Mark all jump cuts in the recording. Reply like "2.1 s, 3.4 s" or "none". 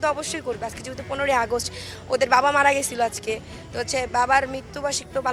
none